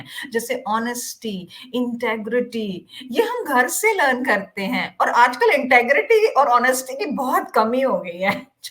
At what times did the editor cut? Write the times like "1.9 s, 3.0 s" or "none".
none